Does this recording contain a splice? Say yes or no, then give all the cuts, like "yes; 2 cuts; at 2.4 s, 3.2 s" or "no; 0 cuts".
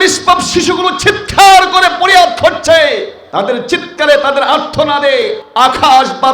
yes; 2 cuts; at 3.2 s, 5.4 s